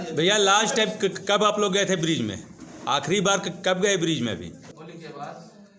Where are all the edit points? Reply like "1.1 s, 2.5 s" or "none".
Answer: 4.7 s